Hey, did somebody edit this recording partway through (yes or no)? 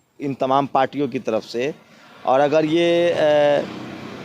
no